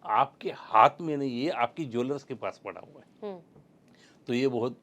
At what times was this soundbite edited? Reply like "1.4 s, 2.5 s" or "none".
none